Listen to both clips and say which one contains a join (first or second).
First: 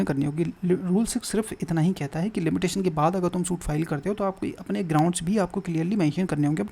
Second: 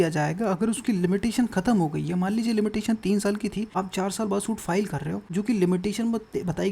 second